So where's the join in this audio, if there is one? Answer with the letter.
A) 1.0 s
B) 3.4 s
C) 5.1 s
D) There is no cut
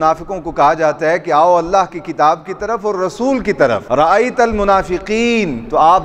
D